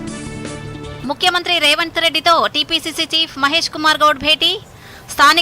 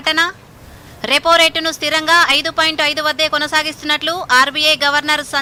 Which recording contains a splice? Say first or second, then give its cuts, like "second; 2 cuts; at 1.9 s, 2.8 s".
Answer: first; 1 cut; at 1.0 s